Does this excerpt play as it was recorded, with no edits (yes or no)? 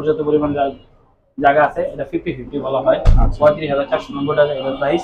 yes